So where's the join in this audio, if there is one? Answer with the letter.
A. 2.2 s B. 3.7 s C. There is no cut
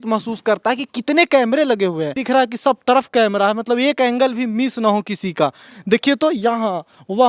A